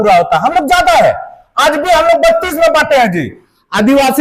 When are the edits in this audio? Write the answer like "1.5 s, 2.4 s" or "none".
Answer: none